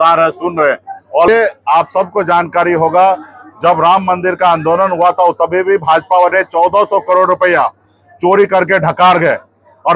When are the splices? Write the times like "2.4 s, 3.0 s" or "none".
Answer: 1.3 s